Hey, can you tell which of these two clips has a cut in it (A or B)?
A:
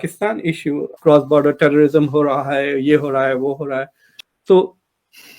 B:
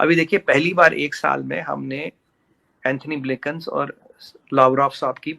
A